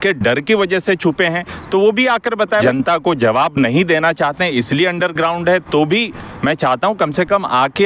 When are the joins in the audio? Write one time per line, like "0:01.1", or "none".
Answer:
0:02.6